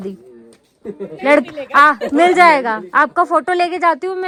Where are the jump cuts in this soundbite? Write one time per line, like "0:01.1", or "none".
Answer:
none